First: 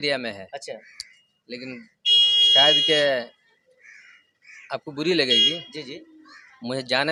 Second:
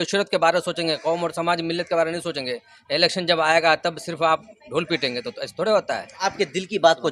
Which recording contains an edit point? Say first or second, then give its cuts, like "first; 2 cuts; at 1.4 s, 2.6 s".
second; 1 cut; at 6.2 s